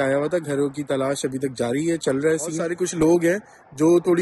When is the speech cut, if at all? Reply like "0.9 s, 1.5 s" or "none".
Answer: 2.8 s